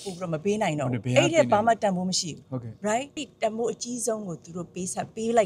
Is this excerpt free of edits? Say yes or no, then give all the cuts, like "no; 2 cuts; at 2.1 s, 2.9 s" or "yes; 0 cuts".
no; 1 cut; at 3.2 s